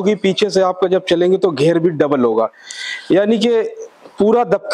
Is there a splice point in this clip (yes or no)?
no